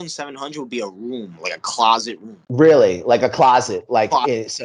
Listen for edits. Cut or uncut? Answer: uncut